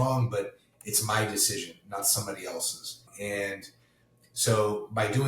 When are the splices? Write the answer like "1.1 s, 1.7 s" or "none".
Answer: 3.1 s